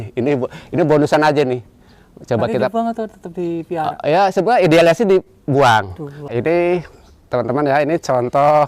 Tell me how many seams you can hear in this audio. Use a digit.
1